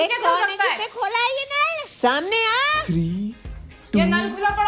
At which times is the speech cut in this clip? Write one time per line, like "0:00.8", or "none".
none